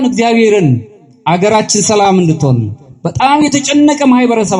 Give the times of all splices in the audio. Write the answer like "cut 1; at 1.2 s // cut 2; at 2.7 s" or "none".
none